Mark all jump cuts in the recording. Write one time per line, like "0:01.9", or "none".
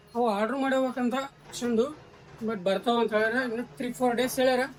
none

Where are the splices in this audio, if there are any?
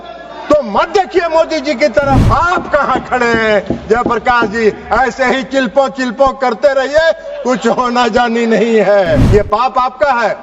0:02.3
0:09.2

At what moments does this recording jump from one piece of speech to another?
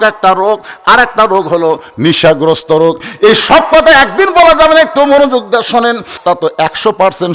0:06.2

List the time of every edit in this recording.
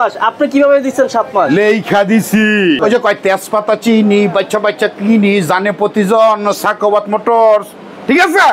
0:02.8

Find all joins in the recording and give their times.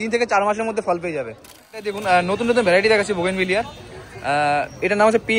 0:01.9

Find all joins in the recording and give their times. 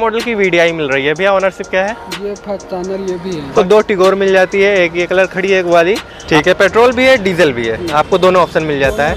0:03.5
0:06.1

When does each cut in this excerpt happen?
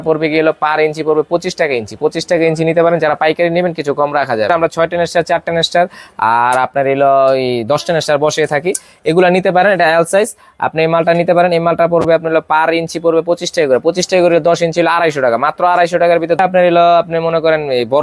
0:04.5
0:16.4

